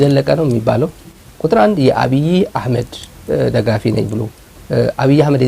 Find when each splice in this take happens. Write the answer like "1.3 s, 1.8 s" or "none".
1.2 s